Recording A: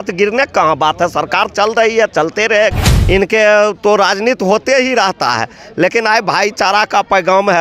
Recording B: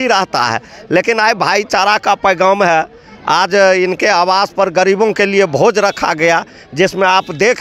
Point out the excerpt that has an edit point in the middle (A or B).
A